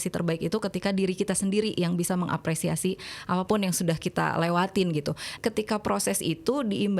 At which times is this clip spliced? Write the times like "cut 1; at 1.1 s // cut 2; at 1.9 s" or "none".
cut 1; at 5.3 s